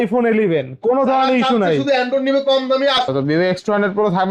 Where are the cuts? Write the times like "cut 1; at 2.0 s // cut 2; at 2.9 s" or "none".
cut 1; at 3.0 s

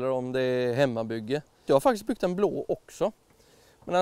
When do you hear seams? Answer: cut 1; at 1.6 s

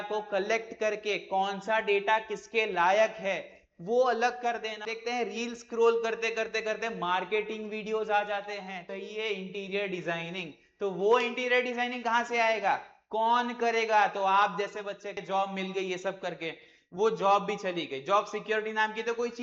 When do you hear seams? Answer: cut 1; at 4.9 s // cut 2; at 8.9 s // cut 3; at 15.2 s

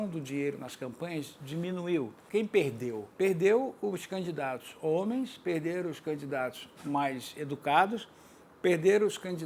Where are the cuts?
cut 1; at 2.2 s // cut 2; at 3.1 s

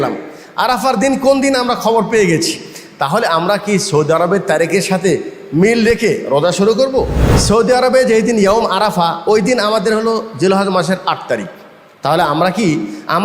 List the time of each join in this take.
cut 1; at 7.2 s

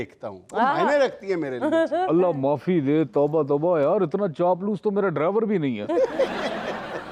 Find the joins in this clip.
none

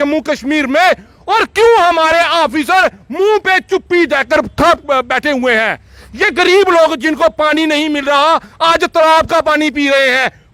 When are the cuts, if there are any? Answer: none

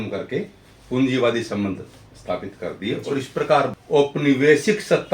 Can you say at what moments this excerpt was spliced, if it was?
cut 1; at 3.8 s

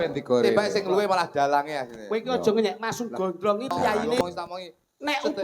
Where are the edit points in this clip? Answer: cut 1; at 4.2 s

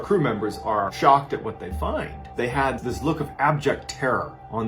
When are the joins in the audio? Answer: cut 1; at 0.9 s // cut 2; at 2.2 s

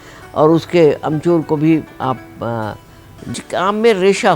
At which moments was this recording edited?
cut 1; at 3.3 s

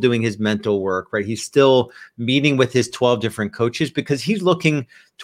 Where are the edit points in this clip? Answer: none

